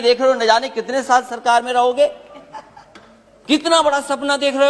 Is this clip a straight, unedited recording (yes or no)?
yes